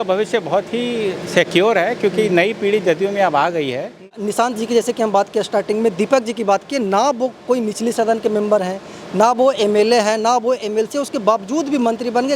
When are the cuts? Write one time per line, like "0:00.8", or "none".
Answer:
0:04.3